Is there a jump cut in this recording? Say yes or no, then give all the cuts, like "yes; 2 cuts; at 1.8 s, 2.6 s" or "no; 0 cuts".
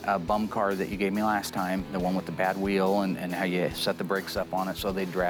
no; 0 cuts